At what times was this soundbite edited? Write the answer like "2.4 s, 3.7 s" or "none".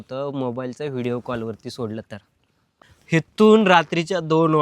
2.7 s

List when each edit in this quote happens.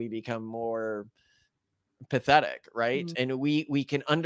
none

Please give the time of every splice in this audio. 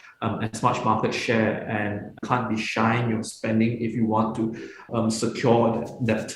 2.2 s, 4.8 s

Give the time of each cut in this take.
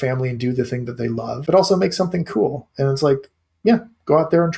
1.4 s

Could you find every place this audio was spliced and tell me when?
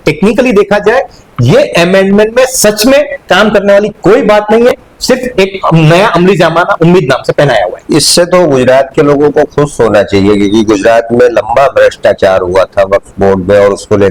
none

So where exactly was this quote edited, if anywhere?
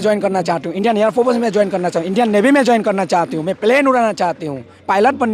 none

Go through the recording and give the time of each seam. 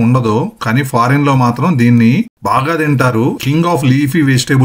3.4 s

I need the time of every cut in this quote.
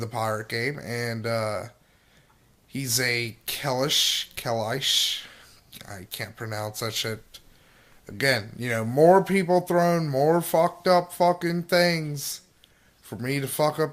3.6 s

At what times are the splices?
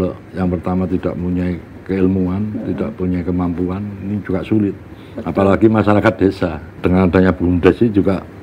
6.7 s

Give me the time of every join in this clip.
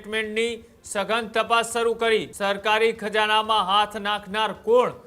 2.3 s

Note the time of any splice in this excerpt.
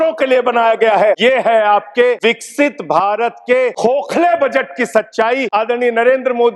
1.2 s, 2.2 s, 3.8 s, 5.5 s

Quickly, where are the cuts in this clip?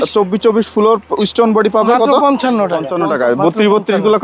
2.8 s

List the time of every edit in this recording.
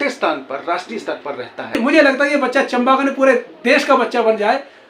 1.8 s

